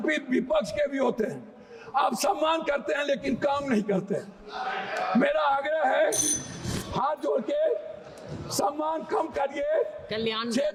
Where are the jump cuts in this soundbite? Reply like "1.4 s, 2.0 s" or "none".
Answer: none

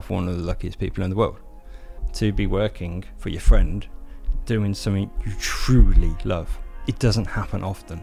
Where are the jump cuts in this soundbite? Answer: none

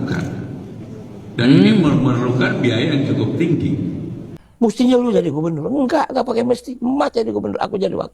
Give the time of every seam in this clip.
4.6 s

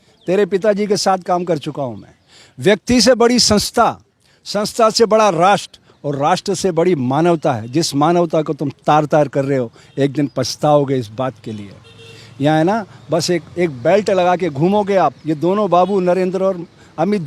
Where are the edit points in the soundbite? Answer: none

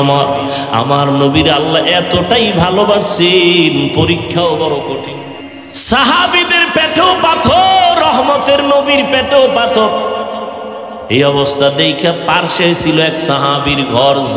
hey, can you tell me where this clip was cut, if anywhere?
5.0 s

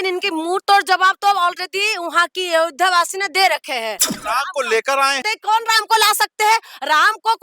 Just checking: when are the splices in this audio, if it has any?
4.2 s, 5.3 s

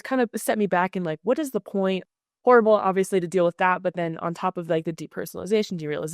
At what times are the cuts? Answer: 2.0 s

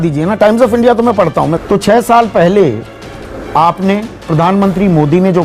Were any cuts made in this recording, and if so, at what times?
1.5 s

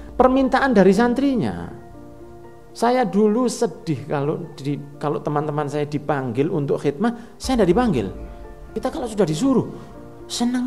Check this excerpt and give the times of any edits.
8.8 s

